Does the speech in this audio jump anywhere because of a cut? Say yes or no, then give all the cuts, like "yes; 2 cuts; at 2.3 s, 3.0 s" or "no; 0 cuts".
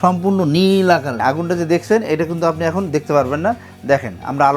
yes; 1 cut; at 1.2 s